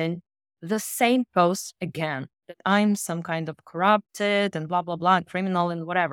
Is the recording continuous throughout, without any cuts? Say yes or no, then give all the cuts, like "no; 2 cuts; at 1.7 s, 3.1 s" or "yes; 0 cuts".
yes; 0 cuts